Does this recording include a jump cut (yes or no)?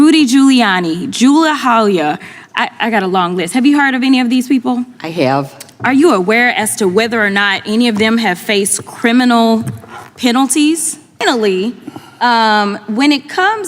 yes